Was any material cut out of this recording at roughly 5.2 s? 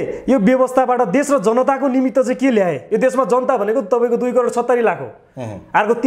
no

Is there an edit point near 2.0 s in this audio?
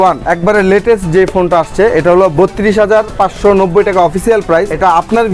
no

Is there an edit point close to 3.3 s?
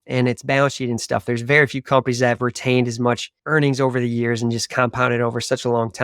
yes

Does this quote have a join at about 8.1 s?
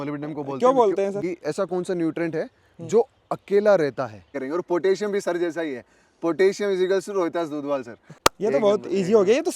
yes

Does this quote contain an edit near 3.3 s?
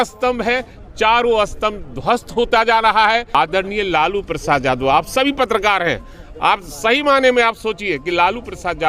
yes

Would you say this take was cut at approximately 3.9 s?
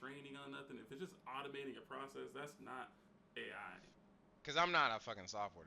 yes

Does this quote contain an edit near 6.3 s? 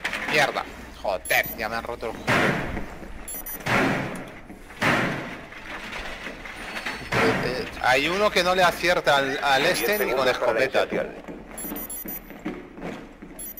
yes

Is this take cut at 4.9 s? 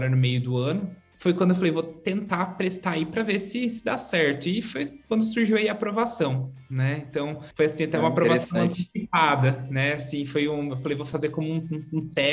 no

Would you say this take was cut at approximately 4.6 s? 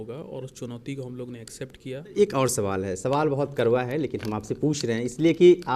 no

